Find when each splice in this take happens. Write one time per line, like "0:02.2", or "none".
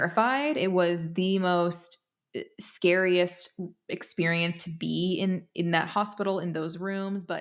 none